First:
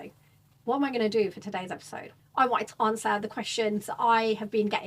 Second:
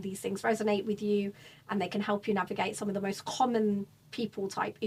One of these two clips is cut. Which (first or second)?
first